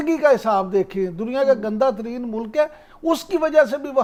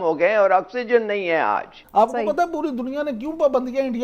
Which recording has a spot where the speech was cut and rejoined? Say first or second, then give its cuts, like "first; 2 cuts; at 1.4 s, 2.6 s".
second; 1 cut; at 1.8 s